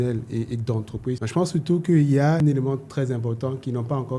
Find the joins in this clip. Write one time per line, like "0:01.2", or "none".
0:01.2
0:02.4